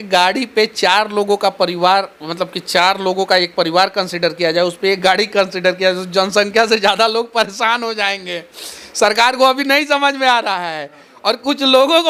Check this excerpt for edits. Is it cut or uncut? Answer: uncut